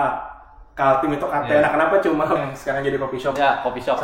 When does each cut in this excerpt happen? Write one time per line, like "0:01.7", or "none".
0:02.4